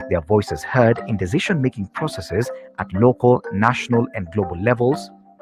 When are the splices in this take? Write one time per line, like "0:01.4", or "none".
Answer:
none